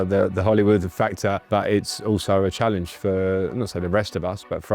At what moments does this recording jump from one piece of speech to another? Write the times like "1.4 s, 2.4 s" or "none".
1.4 s